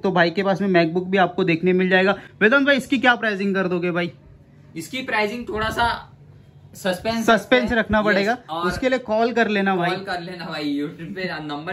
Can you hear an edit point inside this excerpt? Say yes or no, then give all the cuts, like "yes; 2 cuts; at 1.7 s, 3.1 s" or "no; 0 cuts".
no; 0 cuts